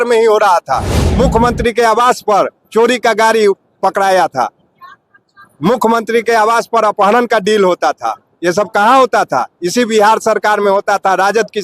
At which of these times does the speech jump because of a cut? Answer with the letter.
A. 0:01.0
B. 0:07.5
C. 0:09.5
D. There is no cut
A